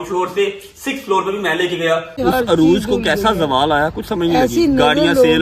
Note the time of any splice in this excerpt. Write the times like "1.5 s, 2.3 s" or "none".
2.1 s